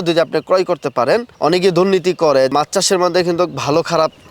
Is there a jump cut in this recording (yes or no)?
yes